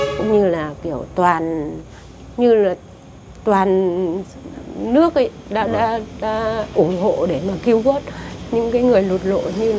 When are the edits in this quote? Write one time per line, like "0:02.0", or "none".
none